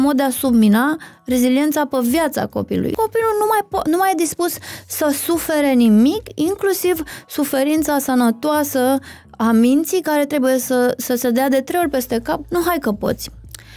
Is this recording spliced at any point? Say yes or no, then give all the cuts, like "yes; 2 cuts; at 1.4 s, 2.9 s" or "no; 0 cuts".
yes; 2 cuts; at 2.9 s, 12.4 s